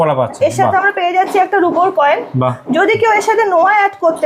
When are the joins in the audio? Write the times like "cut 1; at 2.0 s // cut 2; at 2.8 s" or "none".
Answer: none